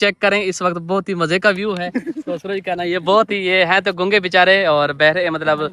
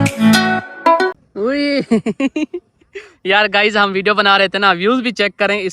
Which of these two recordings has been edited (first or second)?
second